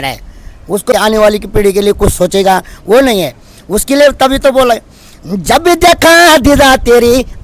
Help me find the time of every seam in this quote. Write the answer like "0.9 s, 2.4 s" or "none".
0.9 s